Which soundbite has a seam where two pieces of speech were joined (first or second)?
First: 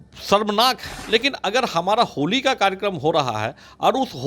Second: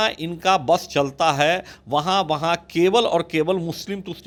first